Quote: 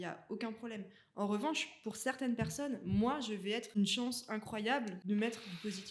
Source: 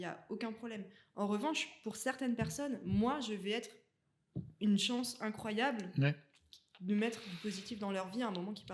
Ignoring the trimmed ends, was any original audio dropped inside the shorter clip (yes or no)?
yes